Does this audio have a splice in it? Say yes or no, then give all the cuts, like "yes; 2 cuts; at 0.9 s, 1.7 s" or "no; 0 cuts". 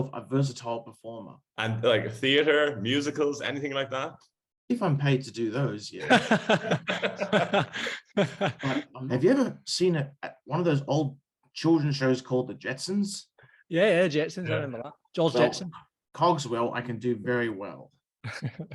yes; 2 cuts; at 1.4 s, 8.9 s